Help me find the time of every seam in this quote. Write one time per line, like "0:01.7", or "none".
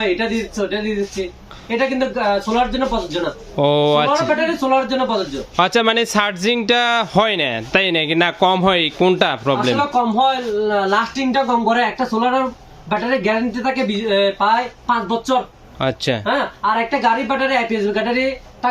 none